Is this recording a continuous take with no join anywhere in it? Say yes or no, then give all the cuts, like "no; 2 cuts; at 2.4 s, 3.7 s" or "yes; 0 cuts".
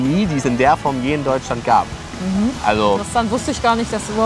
yes; 0 cuts